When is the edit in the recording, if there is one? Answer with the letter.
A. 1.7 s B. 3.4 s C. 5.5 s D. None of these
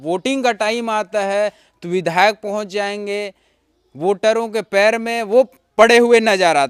D